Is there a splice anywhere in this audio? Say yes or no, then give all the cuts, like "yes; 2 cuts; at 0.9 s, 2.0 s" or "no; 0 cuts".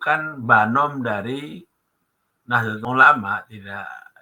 yes; 1 cut; at 2.8 s